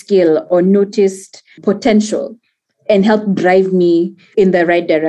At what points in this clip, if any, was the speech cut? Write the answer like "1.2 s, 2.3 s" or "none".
1.6 s, 4.3 s